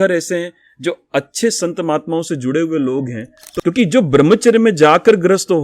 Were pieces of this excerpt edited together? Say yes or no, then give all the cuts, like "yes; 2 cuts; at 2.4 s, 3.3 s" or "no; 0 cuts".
yes; 1 cut; at 3.5 s